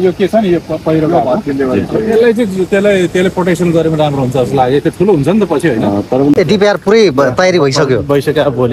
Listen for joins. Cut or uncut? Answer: cut